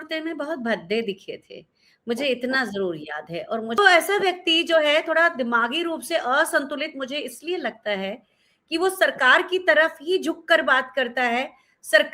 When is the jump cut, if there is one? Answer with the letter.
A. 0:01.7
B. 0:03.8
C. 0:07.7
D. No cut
B